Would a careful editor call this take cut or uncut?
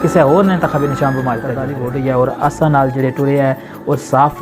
cut